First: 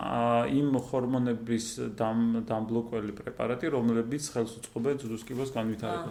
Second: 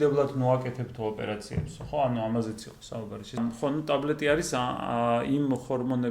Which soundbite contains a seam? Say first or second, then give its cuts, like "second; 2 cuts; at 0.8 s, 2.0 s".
second; 1 cut; at 3.4 s